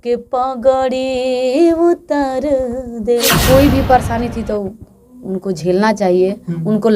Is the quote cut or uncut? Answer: cut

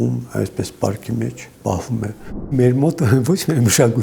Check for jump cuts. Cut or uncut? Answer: cut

